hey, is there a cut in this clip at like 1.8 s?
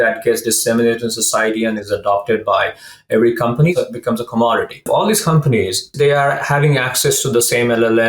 no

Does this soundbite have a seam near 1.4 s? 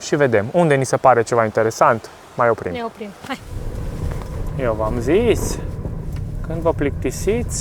no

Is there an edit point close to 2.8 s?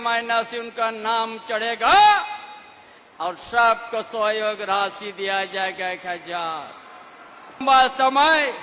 no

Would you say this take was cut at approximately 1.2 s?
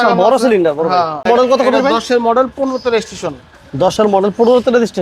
yes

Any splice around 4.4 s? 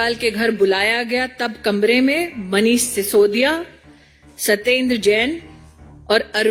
no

